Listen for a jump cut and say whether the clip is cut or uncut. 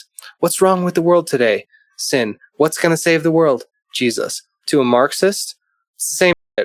uncut